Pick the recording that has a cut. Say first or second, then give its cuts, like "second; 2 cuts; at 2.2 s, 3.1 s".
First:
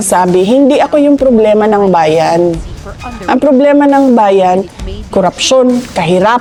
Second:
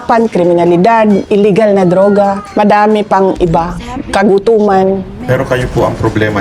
second; 3 cuts; at 1.2 s, 2.4 s, 5.1 s